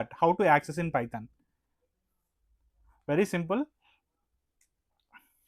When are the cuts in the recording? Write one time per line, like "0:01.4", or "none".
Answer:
none